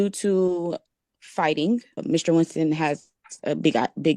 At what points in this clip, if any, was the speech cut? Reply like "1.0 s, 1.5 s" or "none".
2.0 s